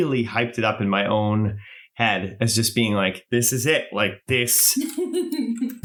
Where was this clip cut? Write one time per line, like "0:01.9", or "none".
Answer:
none

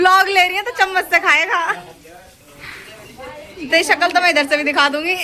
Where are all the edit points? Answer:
none

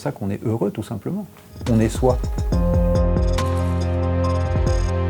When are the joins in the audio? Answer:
0:02.4

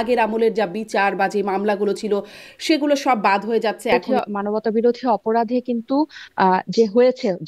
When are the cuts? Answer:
0:04.0

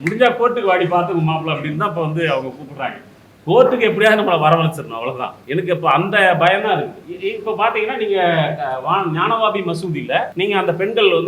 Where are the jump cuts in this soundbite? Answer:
0:05.3
0:07.0
0:10.3

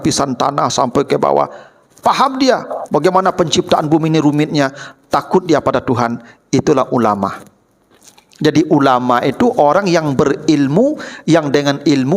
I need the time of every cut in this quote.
none

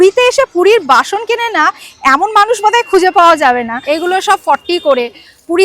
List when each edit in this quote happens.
0:03.7

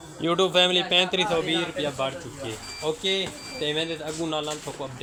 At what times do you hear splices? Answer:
none

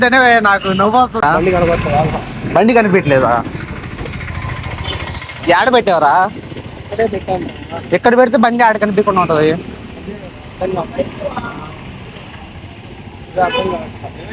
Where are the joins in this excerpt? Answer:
0:01.2

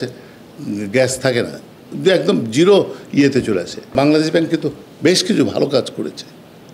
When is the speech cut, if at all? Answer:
0:03.9

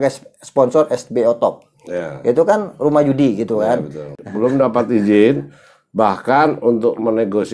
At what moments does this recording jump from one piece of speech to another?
0:04.1

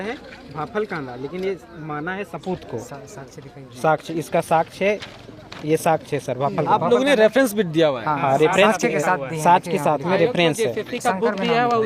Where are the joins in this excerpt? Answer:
none

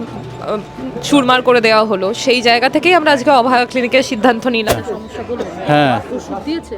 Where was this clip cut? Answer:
0:04.7

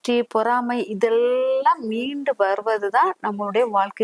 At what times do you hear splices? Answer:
none

